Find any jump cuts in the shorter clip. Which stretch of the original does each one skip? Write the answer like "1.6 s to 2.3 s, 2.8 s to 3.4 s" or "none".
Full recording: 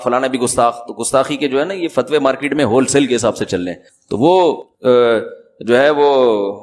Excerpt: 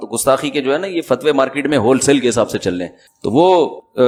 none